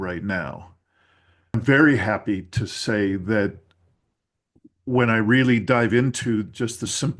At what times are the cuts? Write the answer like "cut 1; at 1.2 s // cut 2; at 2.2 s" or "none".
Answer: cut 1; at 1.5 s